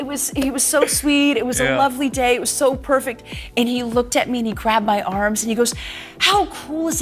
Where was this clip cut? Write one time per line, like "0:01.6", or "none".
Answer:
none